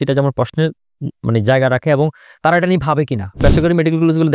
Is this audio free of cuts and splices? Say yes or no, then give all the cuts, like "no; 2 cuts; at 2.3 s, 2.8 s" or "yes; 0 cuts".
no; 1 cut; at 3.4 s